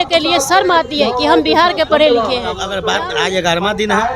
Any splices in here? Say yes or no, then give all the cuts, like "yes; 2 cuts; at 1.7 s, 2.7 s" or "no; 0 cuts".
yes; 1 cut; at 2.8 s